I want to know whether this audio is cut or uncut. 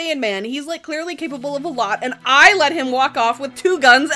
uncut